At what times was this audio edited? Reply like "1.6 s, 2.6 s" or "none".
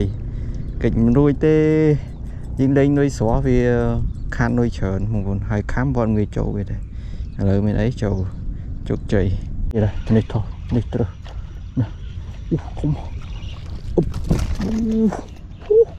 9.5 s